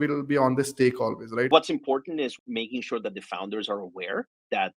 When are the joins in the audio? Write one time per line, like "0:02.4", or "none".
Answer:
0:01.5
0:02.4